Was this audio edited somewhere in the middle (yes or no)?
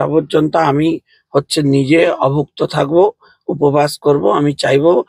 no